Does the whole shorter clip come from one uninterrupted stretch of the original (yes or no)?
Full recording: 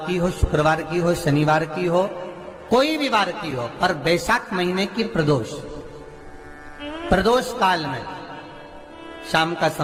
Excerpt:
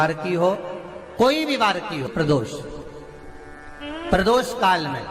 no